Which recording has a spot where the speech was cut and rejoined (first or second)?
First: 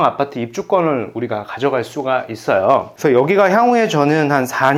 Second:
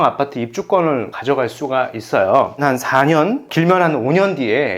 second